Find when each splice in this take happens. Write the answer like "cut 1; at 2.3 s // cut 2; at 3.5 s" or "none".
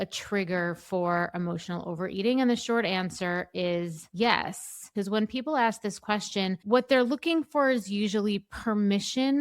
cut 1; at 4.0 s // cut 2; at 4.8 s